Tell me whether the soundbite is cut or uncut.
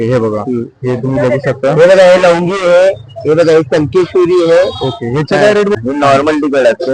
cut